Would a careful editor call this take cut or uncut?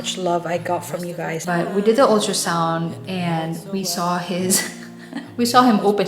cut